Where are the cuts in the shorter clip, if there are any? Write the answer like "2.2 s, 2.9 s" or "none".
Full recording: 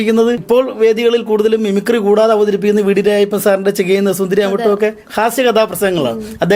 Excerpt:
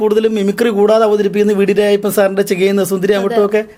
none